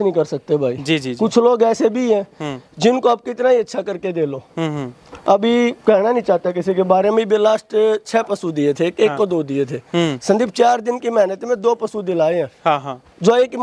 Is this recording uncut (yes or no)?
yes